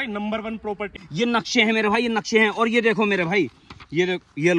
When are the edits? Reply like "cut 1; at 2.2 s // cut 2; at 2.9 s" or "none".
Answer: cut 1; at 0.9 s